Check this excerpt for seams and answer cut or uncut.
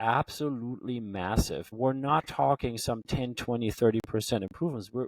cut